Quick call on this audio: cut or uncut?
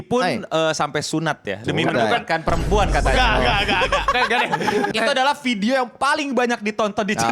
cut